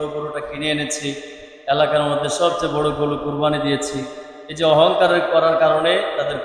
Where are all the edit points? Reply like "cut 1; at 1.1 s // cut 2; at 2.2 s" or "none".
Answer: none